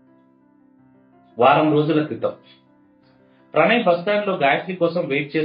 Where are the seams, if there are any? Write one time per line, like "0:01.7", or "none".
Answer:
0:01.3

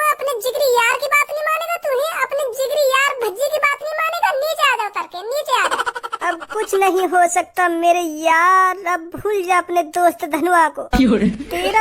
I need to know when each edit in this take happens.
none

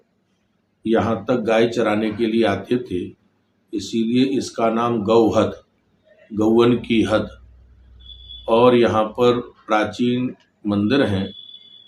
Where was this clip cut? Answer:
none

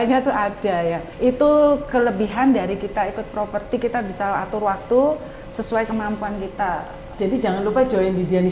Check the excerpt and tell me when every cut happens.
0:01.1
0:07.0

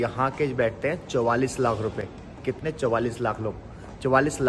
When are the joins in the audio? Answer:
none

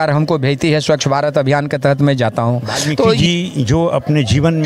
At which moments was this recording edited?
0:02.6

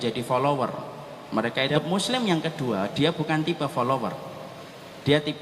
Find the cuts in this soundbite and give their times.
0:01.7

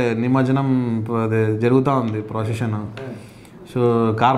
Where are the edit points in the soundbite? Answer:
none

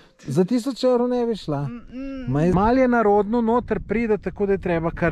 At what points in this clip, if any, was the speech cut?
0:02.5

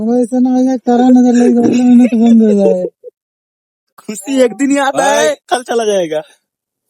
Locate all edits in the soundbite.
0:03.6

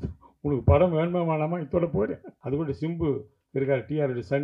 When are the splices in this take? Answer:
0:02.3

